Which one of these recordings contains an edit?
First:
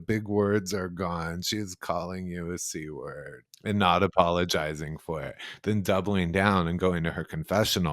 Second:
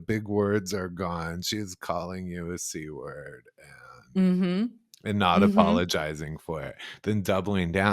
first; 1 cut; at 3.5 s

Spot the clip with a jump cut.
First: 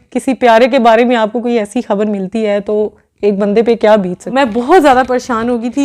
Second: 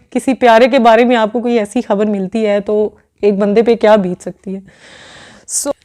first; 1 cut; at 4.3 s

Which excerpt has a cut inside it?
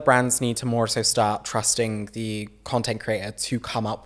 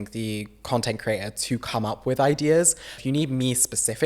second; 1 cut; at 3.0 s

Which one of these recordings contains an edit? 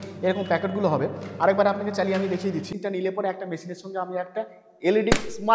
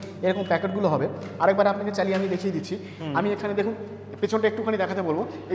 first; 1 cut; at 2.7 s

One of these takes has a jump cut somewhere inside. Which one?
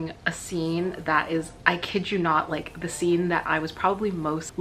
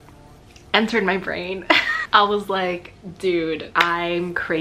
second; 2 cuts; at 1.9 s, 3.7 s

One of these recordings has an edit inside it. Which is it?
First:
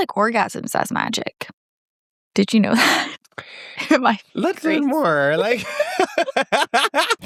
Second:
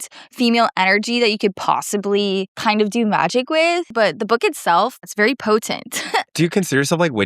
second; 4 cuts; at 2.5 s, 3.9 s, 5.1 s, 6.3 s

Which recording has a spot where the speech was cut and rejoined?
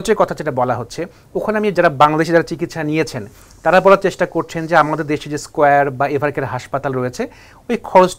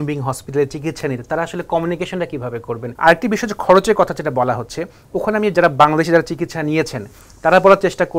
second; 1 cut; at 2.9 s

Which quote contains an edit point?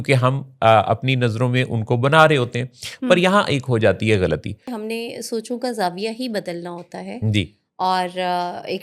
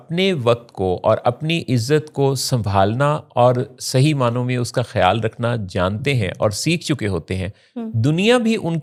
first; 1 cut; at 4.7 s

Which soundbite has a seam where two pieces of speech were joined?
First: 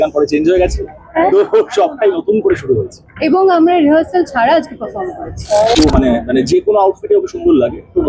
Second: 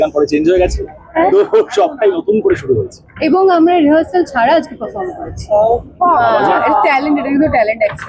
first; 1 cut; at 5.8 s

